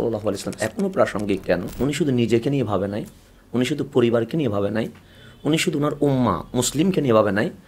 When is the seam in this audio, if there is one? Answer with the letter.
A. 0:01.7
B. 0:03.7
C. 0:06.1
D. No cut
A